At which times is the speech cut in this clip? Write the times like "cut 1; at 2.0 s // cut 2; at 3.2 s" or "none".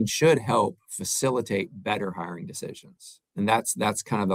none